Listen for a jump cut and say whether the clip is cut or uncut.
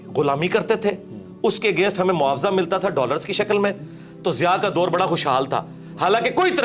uncut